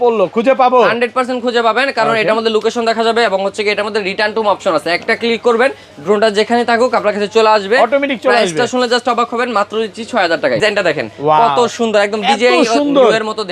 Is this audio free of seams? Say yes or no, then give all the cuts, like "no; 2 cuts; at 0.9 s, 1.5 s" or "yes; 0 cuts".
no; 1 cut; at 10.6 s